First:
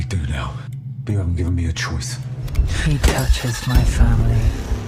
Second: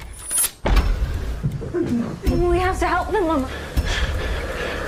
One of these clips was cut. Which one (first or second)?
first